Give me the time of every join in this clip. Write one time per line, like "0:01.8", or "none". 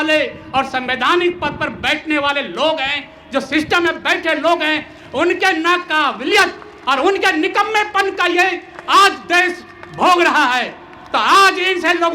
none